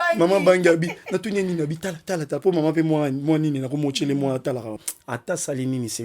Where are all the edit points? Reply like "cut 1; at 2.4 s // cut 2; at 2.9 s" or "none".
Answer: cut 1; at 4.8 s